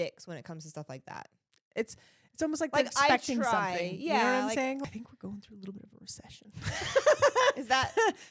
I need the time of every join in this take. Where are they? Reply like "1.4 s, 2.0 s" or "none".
4.8 s

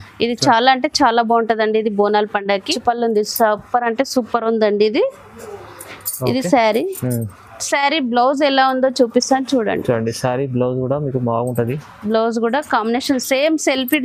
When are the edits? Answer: 2.7 s

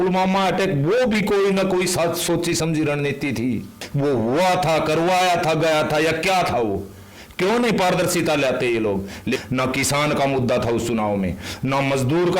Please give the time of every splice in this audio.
3.8 s, 9.4 s

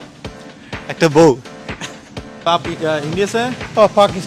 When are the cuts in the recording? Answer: 2.5 s

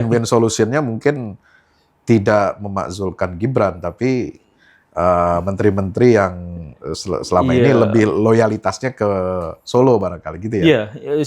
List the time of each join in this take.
none

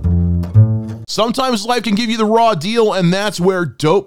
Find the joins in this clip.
1.0 s

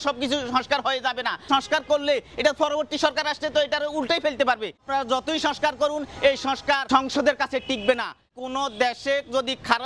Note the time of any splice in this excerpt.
1.5 s, 4.8 s, 6.8 s, 8.3 s

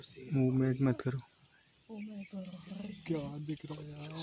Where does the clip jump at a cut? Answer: none

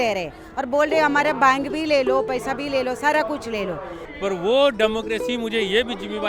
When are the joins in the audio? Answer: 4.0 s

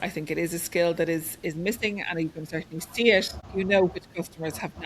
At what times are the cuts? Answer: 3.4 s

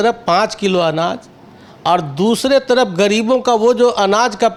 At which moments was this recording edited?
none

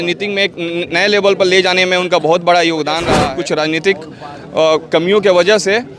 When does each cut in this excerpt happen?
3.1 s

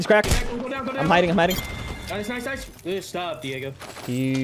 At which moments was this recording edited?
2.7 s

